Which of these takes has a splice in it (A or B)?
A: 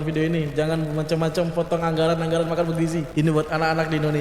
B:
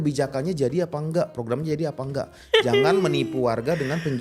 A